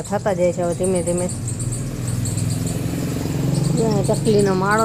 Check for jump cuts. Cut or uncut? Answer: uncut